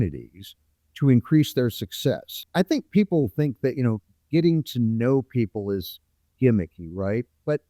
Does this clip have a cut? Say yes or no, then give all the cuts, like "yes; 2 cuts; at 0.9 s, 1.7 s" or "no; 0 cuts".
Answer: yes; 1 cut; at 2.3 s